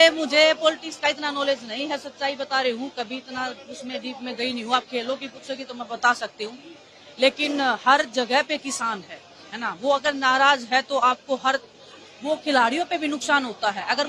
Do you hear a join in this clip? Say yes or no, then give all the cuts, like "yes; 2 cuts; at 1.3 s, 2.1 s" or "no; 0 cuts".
no; 0 cuts